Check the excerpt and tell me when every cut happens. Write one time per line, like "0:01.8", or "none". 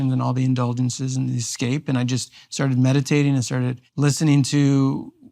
0:03.8